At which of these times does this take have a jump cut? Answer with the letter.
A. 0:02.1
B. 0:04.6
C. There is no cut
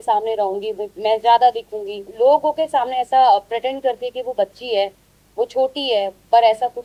A